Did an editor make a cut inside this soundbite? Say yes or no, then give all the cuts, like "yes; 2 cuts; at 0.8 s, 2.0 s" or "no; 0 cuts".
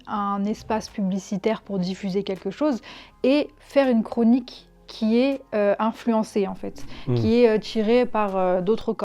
no; 0 cuts